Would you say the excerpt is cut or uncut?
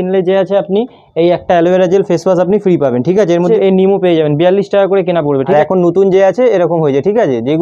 cut